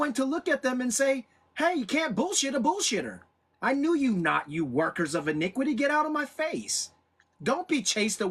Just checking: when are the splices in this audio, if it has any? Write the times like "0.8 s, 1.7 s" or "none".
none